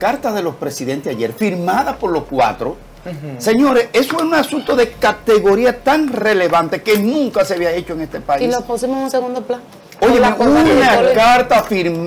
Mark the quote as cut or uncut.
uncut